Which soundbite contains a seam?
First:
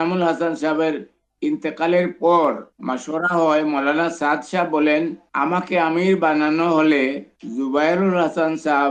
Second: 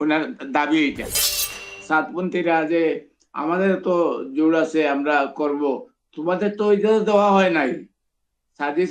second; 1 cut; at 1.2 s

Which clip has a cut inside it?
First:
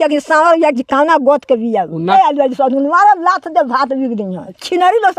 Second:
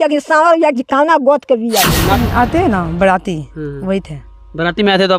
second; 1 cut; at 2.1 s

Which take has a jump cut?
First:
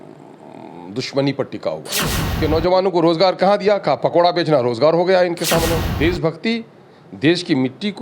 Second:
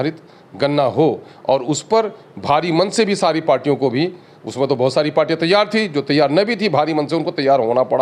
first; 2 cuts; at 2.3 s, 5.8 s

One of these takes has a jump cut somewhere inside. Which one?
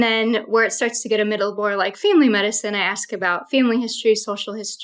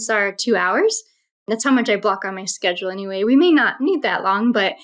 second; 1 cut; at 1.3 s

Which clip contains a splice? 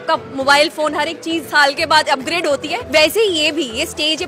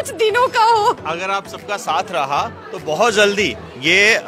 first; 1 cut; at 2.8 s

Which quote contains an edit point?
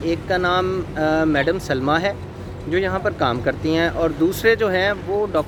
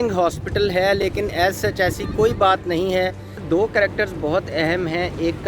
second; 1 cut; at 3.4 s

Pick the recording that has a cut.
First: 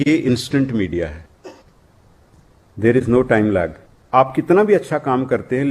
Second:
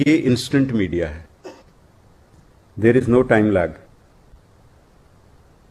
first; 1 cut; at 4.0 s

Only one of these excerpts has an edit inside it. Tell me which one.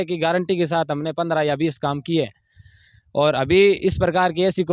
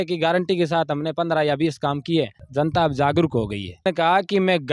second; 2 cuts; at 2.4 s, 3.8 s

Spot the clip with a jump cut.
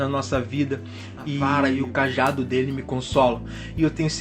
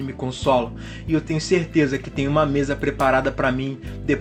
first; 1 cut; at 1.5 s

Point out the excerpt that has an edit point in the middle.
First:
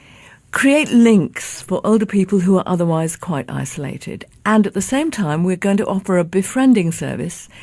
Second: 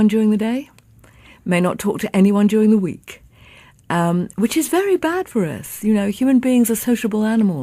first; 1 cut; at 5.7 s

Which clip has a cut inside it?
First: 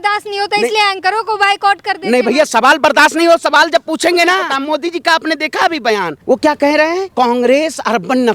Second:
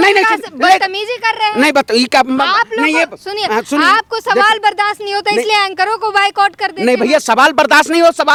first; 3 cuts; at 4.5 s, 6.2 s, 7.1 s

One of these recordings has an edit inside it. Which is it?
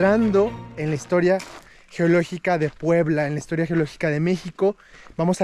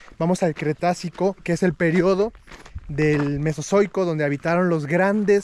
second; 1 cut; at 1.4 s

